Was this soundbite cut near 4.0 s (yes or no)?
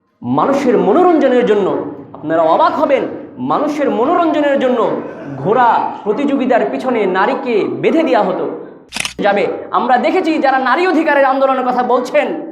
no